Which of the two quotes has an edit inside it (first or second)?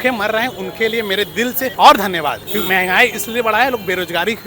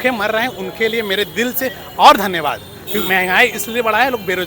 first